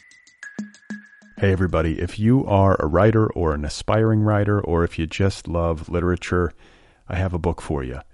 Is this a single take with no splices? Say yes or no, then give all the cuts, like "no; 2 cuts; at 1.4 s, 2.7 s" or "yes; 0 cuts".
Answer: no; 1 cut; at 0.9 s